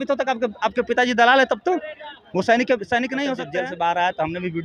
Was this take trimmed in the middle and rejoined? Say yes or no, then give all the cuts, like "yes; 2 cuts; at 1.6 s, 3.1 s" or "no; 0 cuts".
yes; 1 cut; at 3.4 s